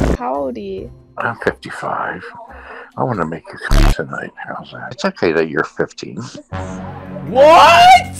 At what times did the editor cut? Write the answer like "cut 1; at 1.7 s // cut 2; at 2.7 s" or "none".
cut 1; at 4.9 s